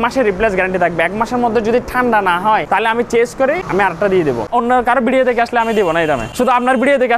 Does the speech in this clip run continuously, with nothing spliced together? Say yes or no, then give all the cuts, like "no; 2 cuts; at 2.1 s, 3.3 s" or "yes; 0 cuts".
no; 4 cuts; at 2.6 s, 3.6 s, 4.5 s, 6.3 s